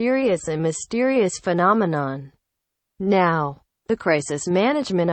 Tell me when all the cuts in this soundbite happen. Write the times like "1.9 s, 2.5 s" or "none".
4.1 s